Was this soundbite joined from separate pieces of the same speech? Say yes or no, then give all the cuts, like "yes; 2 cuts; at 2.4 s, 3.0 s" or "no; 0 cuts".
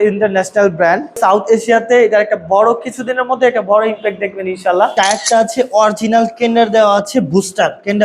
yes; 2 cuts; at 1.2 s, 5.2 s